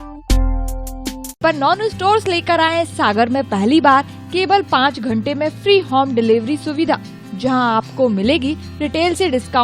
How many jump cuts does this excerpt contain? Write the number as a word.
zero